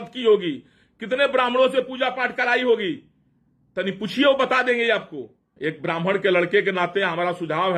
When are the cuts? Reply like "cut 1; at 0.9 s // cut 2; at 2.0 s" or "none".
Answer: cut 1; at 5.4 s